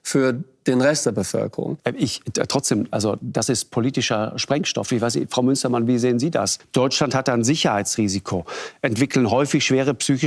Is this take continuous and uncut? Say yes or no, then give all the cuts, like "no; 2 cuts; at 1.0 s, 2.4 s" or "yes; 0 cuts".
no; 2 cuts; at 1.8 s, 6.6 s